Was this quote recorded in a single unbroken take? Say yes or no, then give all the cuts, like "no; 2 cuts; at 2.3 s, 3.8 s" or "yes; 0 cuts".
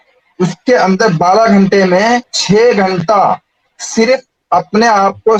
yes; 0 cuts